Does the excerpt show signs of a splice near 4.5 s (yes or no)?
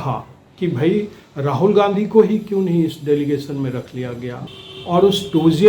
yes